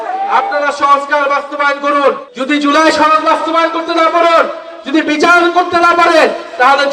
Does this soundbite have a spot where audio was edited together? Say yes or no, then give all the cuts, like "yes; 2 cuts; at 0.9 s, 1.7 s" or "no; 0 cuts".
yes; 1 cut; at 2.3 s